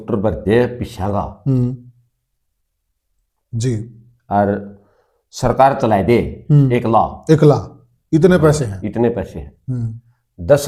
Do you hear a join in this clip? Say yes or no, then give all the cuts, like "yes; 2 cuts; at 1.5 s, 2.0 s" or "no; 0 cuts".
no; 0 cuts